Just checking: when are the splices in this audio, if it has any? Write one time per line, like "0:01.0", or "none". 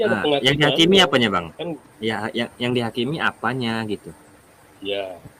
none